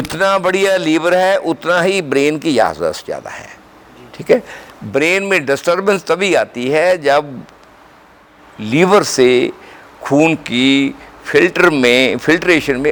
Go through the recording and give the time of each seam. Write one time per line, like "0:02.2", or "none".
none